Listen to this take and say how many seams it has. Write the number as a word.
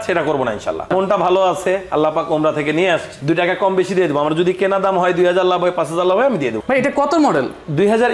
three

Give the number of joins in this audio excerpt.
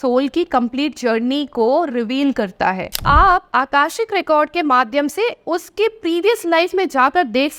one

